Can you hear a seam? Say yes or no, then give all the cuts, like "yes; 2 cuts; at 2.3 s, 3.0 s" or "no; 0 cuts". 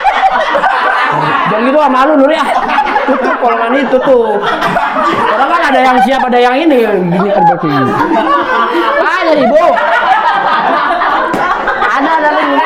no; 0 cuts